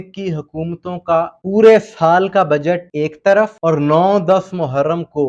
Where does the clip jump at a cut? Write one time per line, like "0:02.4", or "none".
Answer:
0:01.4
0:02.9
0:03.5